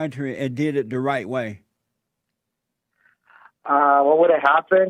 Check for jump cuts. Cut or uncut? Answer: uncut